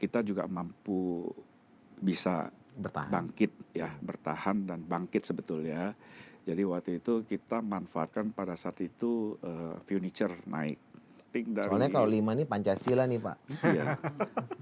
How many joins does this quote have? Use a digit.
1